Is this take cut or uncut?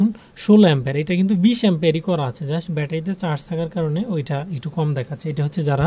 uncut